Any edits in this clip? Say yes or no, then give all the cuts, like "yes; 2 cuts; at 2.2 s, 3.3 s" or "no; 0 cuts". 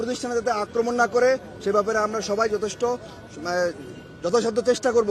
no; 0 cuts